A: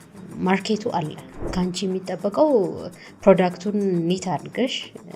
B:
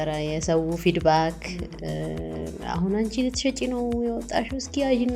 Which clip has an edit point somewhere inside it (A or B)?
A